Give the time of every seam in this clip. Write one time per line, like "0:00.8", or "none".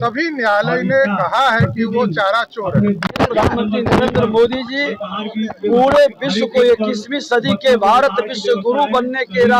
none